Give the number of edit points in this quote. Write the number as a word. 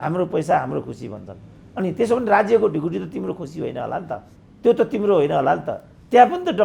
zero